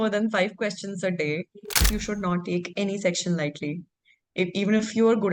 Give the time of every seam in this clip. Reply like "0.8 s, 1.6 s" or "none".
1.8 s